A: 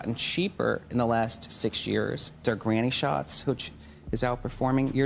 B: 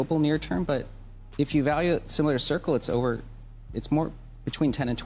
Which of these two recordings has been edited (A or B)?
A